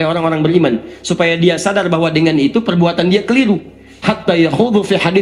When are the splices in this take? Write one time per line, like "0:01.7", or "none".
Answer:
none